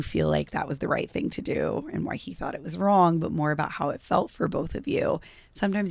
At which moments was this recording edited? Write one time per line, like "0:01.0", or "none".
none